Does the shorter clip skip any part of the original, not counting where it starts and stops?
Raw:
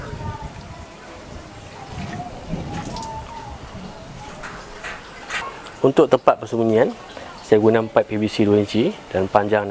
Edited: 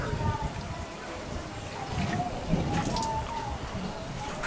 no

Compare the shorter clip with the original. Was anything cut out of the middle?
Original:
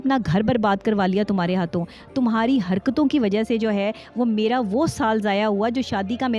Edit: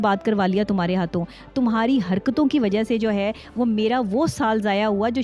no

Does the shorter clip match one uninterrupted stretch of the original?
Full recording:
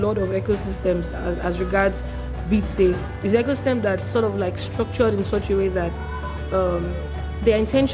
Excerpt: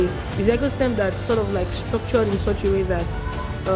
yes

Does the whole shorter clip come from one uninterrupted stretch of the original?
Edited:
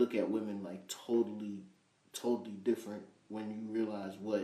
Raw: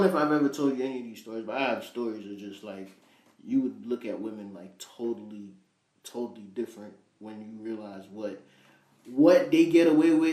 yes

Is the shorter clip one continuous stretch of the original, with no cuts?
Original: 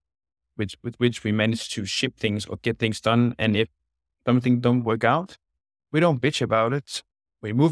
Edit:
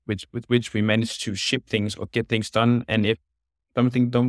yes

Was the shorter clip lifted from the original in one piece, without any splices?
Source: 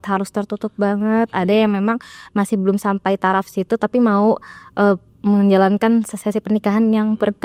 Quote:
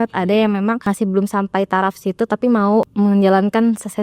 no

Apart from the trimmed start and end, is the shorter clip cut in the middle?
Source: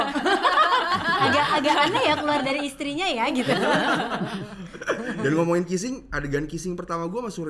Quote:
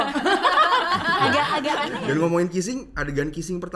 yes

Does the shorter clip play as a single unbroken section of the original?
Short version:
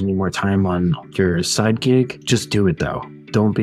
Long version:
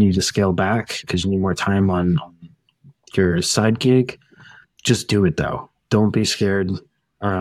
no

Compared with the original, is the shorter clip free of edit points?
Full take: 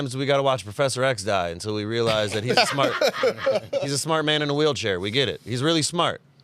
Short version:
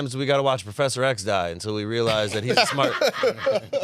yes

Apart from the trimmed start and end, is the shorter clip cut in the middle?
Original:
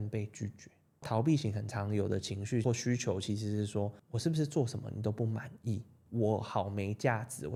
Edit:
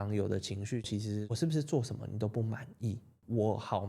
yes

